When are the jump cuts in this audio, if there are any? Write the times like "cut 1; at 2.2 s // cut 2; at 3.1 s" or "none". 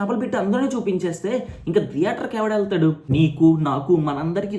cut 1; at 3.0 s